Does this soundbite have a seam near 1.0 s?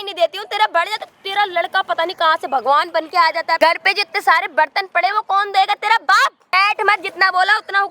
no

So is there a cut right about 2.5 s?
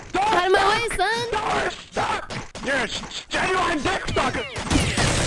yes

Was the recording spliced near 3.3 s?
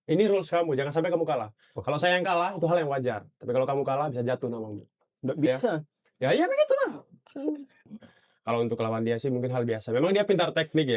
no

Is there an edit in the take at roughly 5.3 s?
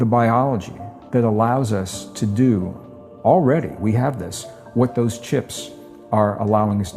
no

